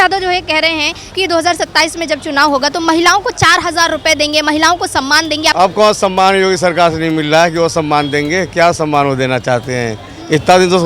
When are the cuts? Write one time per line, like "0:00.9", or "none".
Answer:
0:01.1
0:05.5